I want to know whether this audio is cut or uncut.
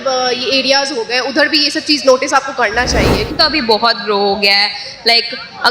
cut